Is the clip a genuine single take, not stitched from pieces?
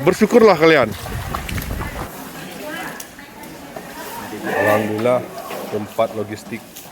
no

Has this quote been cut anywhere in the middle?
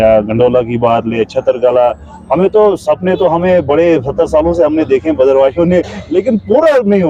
no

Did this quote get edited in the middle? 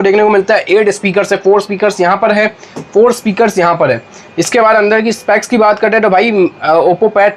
no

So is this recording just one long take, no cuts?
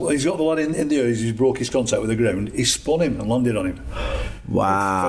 yes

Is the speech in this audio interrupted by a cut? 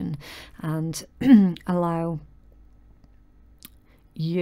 no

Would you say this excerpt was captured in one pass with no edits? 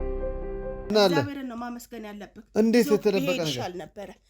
no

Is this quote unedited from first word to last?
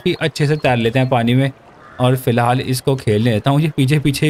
yes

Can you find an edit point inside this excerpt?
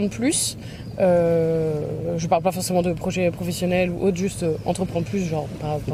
no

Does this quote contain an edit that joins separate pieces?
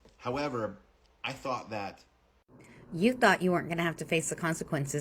no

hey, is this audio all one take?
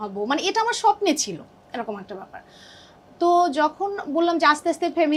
yes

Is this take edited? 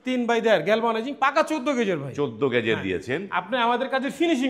no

